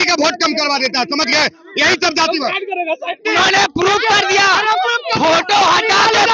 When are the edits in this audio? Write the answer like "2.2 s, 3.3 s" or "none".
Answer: 3.2 s